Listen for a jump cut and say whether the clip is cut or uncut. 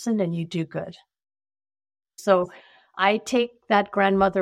cut